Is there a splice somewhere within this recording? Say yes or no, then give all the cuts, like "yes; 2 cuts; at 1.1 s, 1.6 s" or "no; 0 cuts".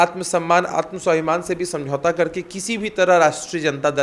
no; 0 cuts